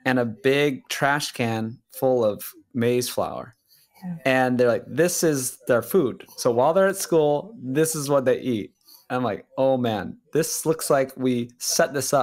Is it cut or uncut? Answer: uncut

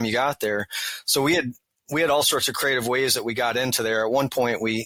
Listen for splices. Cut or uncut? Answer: uncut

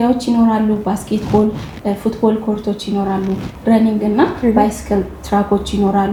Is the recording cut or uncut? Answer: uncut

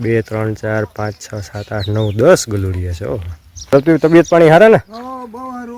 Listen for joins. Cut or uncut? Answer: cut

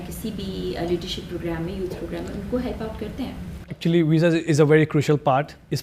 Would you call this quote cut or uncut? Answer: uncut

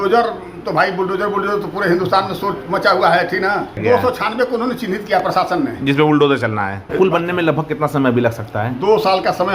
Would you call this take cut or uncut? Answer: cut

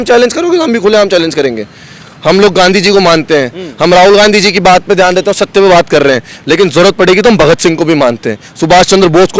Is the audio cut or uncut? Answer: uncut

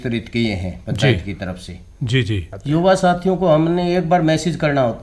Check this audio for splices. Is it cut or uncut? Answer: cut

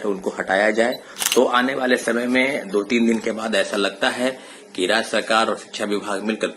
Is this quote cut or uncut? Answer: cut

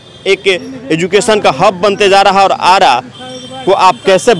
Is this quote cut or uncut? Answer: uncut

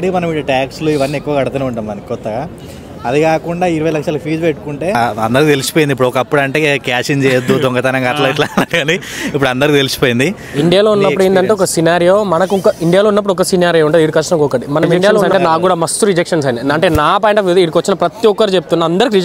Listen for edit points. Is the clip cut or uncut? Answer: cut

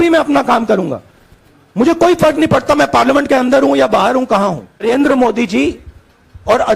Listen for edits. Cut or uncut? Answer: cut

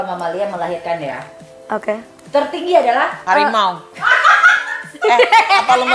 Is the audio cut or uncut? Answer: cut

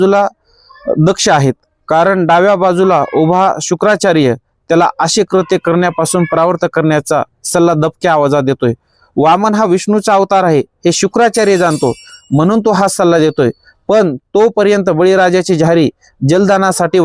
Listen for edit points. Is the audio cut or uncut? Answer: uncut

